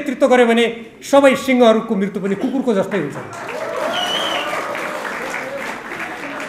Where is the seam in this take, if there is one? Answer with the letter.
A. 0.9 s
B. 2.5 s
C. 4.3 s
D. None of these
D